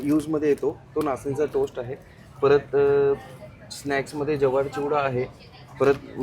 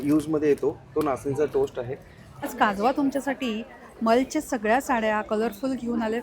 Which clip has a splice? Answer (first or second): second